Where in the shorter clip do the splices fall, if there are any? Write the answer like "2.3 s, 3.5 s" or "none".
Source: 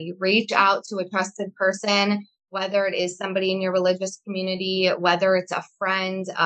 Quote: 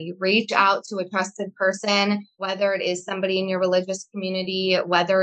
2.3 s